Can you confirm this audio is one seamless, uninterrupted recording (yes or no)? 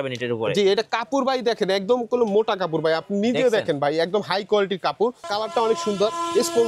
no